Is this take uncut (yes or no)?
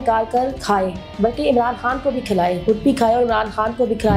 yes